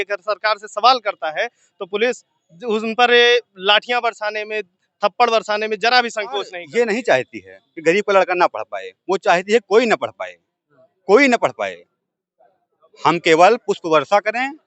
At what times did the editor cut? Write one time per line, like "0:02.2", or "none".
0:06.6